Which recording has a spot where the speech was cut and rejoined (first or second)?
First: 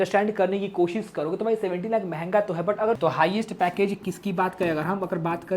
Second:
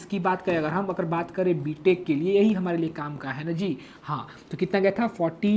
first